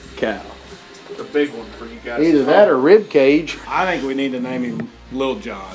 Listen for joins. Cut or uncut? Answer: cut